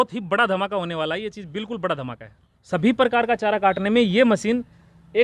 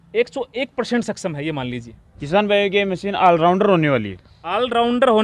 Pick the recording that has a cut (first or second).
first